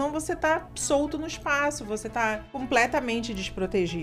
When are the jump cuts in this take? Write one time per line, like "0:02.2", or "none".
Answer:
0:02.5